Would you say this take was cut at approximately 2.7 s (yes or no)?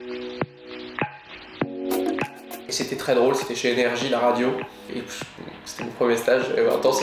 yes